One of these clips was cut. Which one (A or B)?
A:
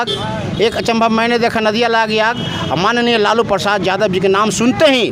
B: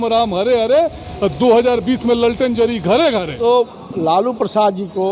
B